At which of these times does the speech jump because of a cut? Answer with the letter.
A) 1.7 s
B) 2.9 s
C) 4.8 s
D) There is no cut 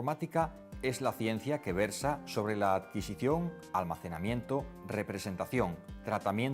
C